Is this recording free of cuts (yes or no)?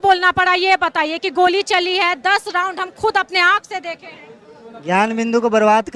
yes